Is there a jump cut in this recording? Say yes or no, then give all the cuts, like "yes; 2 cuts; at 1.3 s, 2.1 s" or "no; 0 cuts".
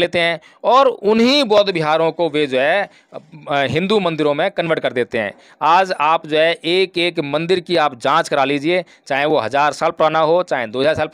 no; 0 cuts